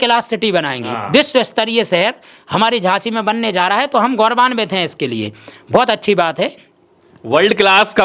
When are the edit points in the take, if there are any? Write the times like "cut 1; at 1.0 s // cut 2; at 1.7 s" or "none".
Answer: none